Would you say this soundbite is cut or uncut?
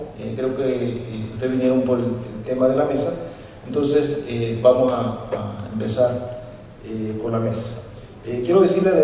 cut